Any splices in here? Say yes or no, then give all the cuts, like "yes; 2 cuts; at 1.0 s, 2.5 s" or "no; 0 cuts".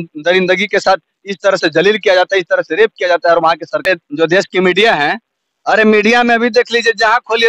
yes; 1 cut; at 3.8 s